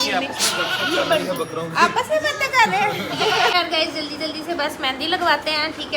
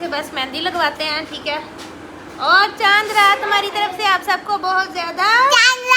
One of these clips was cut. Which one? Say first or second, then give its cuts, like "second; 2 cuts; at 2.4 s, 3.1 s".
first; 1 cut; at 3.5 s